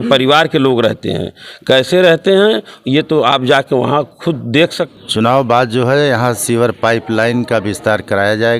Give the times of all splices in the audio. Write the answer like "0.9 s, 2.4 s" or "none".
4.9 s

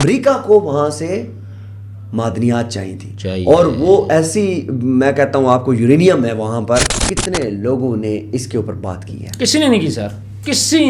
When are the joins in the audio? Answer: 7.1 s

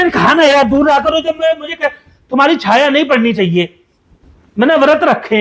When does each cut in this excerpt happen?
none

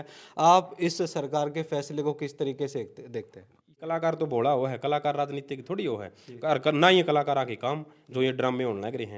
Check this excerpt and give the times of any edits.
3.8 s

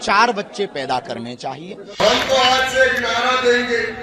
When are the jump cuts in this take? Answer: 2.0 s

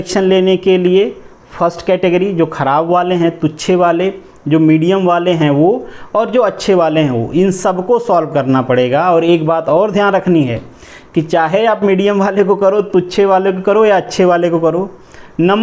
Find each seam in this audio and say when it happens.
none

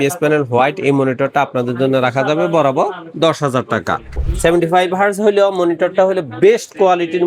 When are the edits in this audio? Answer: 4.2 s

